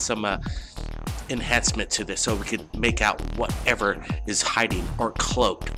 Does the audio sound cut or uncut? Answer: uncut